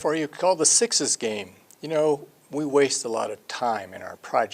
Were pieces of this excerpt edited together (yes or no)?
yes